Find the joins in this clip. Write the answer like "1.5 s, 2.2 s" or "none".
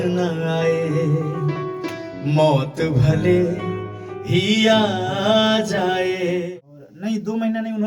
6.4 s